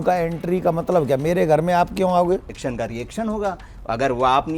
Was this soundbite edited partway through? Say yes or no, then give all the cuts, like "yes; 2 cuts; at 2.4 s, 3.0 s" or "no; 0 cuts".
yes; 1 cut; at 2.5 s